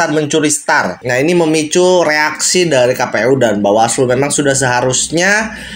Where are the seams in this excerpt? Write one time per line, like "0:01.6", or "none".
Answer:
0:01.0